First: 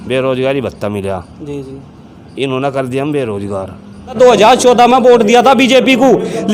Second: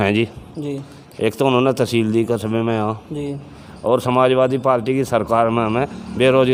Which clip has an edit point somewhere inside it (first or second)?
first